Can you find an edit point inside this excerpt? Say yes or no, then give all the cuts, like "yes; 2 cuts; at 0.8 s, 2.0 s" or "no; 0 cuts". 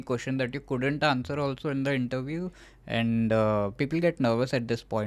no; 0 cuts